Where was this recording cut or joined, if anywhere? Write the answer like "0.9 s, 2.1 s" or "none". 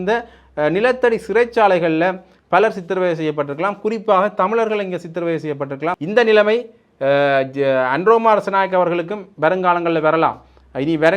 6.0 s